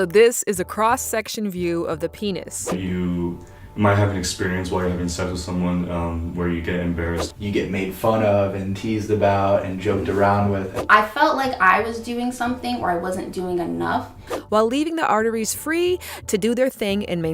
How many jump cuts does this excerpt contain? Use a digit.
4